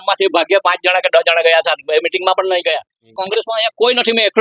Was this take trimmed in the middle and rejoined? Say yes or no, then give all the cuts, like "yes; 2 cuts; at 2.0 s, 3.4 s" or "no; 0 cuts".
yes; 1 cut; at 3.1 s